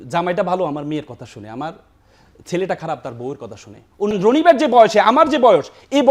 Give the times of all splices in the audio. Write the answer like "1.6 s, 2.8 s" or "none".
4.2 s